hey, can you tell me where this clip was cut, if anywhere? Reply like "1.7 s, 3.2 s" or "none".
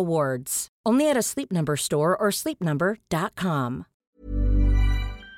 4.1 s